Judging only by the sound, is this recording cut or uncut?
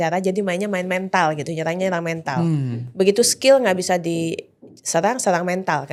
uncut